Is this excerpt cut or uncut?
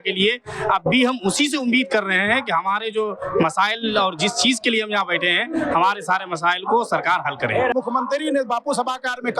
uncut